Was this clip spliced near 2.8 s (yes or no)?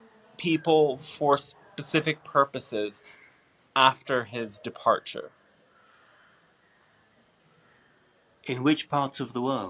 no